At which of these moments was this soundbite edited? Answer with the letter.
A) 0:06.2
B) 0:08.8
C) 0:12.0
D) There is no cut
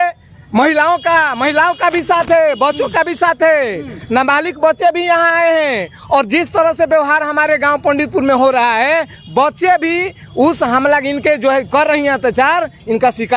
D